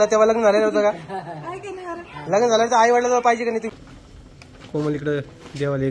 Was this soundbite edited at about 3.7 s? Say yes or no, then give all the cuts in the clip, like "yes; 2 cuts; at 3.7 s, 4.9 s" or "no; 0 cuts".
yes; 1 cut; at 3.7 s